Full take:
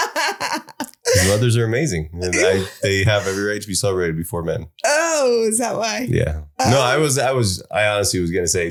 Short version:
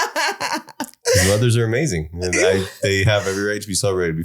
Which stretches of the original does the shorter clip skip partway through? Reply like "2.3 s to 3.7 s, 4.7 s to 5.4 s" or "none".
none